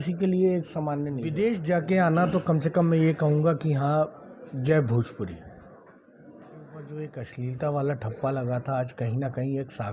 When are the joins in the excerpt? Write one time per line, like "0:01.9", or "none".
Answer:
0:01.2
0:07.0